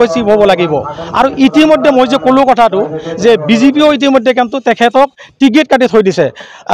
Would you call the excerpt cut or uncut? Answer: uncut